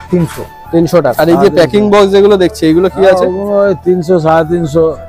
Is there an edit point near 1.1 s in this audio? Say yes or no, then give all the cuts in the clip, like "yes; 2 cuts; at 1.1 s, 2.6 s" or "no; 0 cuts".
yes; 1 cut; at 1.1 s